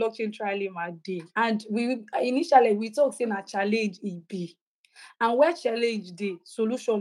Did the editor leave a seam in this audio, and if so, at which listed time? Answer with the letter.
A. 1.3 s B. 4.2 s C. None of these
A